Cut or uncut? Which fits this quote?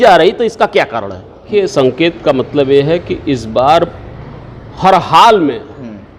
cut